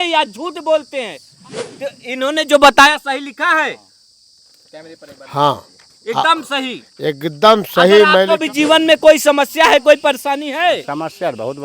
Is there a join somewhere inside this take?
yes; 2 cuts; at 1.2 s, 8.3 s

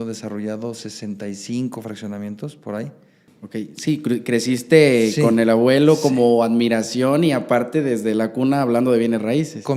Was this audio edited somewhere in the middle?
yes; 1 cut; at 3.3 s

